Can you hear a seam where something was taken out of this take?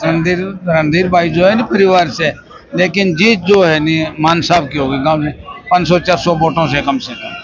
no; 0 cuts

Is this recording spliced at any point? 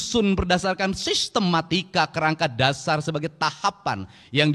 no; 0 cuts

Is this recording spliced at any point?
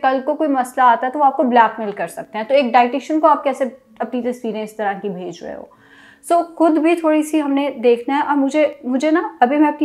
no; 0 cuts

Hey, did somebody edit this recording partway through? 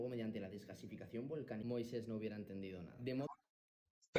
no; 0 cuts

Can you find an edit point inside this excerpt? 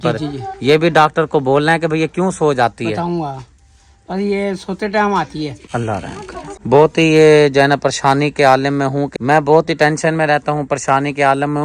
no; 0 cuts

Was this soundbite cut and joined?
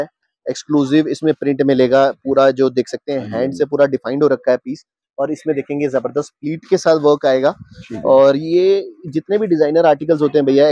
no; 0 cuts

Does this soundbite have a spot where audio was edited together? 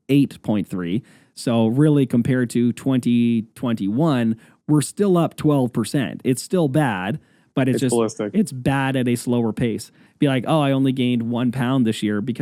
no; 0 cuts

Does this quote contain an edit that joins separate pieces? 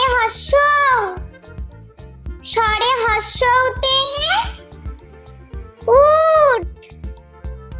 yes; 2 cuts; at 4.5 s, 5.9 s

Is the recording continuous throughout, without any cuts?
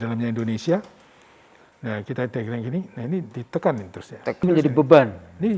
no; 1 cut; at 4.4 s

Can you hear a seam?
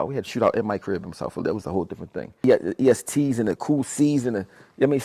yes; 1 cut; at 2.4 s

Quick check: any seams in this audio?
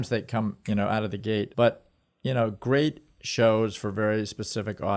yes; 1 cut; at 1.5 s

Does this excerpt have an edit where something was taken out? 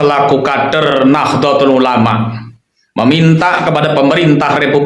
no; 0 cuts

